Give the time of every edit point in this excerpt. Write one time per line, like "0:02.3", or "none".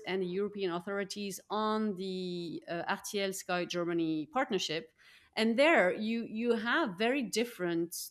none